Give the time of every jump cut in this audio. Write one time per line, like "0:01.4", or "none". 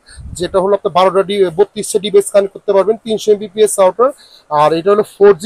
none